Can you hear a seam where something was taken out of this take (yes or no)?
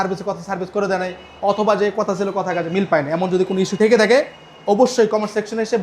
no